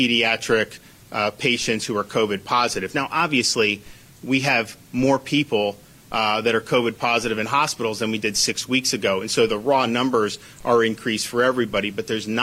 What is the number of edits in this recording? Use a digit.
0